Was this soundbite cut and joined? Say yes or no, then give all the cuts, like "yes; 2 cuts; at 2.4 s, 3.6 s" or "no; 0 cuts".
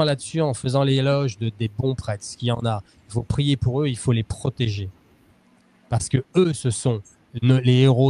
no; 0 cuts